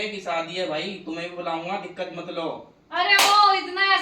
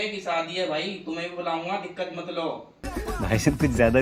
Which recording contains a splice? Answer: first; 1 cut; at 2.9 s

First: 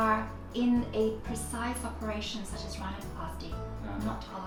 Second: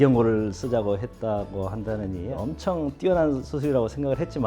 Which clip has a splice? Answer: second; 1 cut; at 2.4 s

